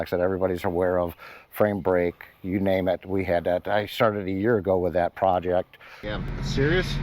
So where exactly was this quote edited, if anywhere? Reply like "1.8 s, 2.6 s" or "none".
5.9 s